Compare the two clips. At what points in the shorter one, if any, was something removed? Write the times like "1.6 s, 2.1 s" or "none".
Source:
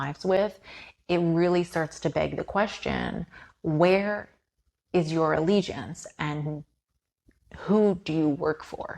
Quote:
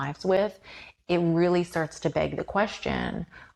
none